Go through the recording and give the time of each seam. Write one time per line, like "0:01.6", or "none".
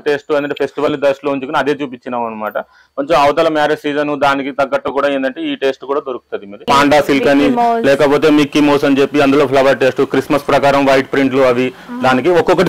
0:06.6